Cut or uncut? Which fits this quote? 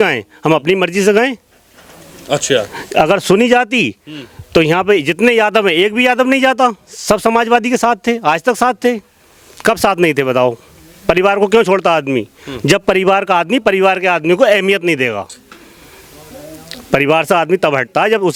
uncut